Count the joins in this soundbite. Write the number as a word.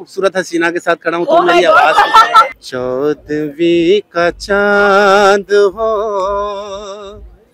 one